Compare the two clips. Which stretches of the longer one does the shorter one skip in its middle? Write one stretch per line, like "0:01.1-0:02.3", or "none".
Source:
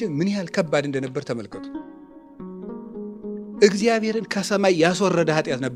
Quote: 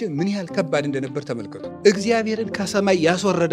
0:01.6-0:03.4